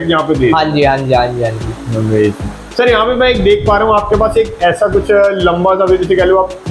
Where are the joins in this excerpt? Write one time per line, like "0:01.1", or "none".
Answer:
none